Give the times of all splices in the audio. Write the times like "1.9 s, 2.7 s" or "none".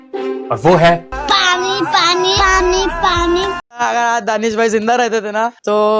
3.6 s